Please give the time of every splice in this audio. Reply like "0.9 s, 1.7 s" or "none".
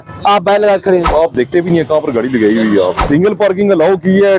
1.1 s, 3.0 s